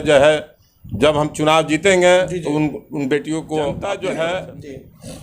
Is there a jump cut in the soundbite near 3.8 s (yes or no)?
yes